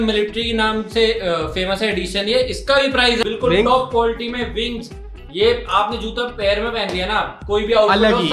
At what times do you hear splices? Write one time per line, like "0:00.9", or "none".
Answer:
0:03.2